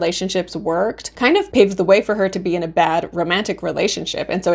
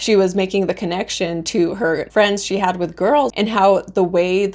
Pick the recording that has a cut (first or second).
second